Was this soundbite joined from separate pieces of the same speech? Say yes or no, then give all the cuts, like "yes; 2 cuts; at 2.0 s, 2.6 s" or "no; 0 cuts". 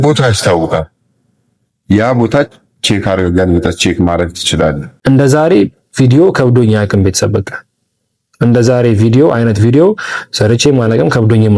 yes; 1 cut; at 4.9 s